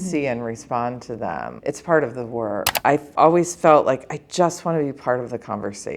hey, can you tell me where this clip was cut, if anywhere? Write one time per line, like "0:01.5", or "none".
0:01.5
0:02.7